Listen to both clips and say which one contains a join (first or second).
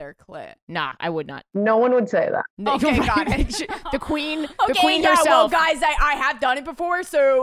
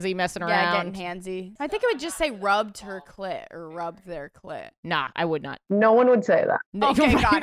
second